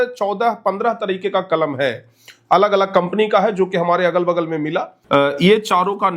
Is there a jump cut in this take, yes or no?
yes